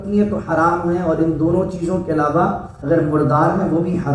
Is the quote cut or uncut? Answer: cut